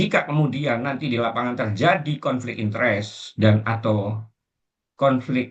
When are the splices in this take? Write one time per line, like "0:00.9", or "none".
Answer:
none